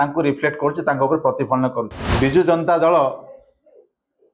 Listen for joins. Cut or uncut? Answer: cut